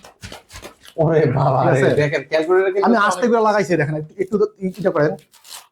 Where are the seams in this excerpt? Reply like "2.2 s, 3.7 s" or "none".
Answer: none

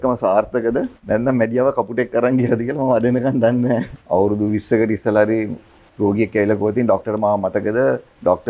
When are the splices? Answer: 1.0 s, 3.9 s

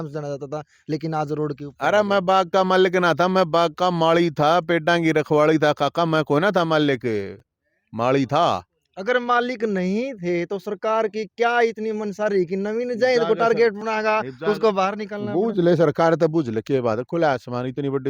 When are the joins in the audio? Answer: none

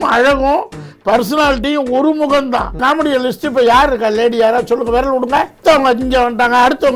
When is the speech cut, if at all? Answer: 2.7 s, 5.6 s

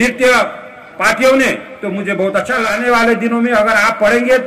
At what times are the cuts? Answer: 2.7 s

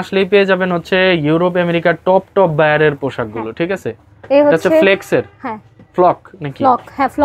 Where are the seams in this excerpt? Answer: none

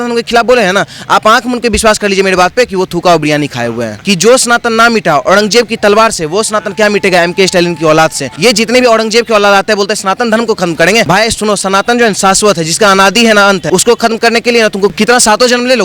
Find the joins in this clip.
3.9 s, 8.2 s, 11.1 s, 13.6 s, 14.9 s

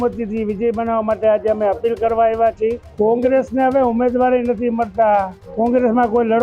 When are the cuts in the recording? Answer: 2.9 s, 5.4 s

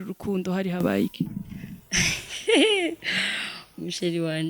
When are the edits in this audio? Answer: none

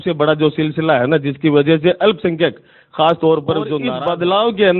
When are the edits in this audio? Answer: 3.9 s

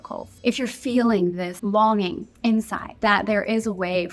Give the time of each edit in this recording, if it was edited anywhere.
1.5 s

